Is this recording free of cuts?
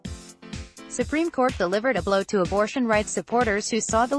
no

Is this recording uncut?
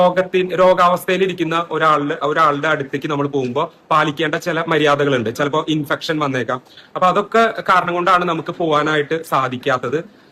yes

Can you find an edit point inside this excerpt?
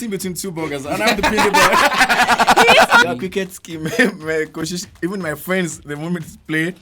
yes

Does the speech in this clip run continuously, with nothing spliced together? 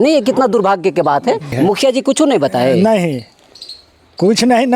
no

